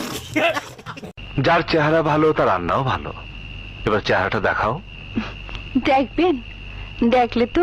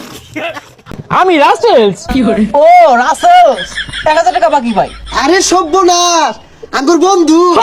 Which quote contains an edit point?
first; 1 cut; at 0.9 s

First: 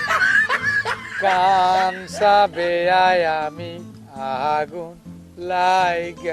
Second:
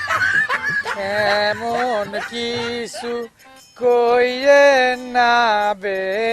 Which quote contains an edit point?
first; 1 cut; at 0.9 s

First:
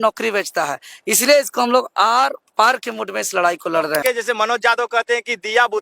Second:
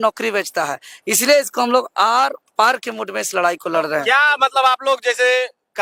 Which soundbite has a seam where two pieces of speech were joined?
first; 1 cut; at 3.9 s

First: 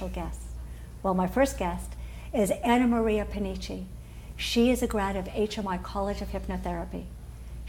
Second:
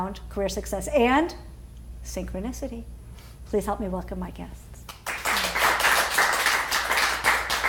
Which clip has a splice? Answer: second; 1 cut; at 5.2 s

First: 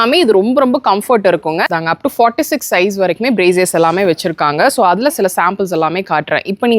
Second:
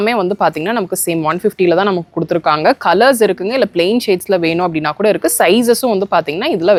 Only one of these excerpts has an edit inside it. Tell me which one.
first; 1 cut; at 1.7 s

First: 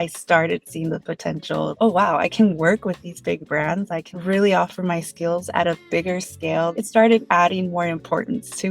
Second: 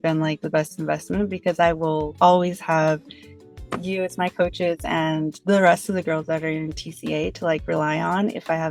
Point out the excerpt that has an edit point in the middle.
first; 3 cuts; at 1.7 s, 4.1 s, 6.8 s

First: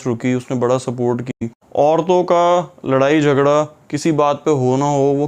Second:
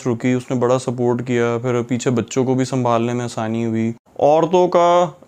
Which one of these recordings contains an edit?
first; 1 cut; at 1.3 s

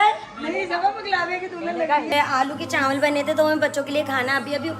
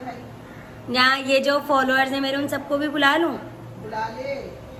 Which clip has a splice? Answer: first; 1 cut; at 2.1 s

